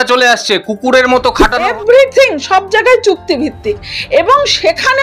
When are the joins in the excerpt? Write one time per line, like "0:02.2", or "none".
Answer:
0:01.6